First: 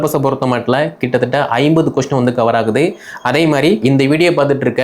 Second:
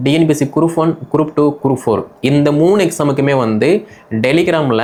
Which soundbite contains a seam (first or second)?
first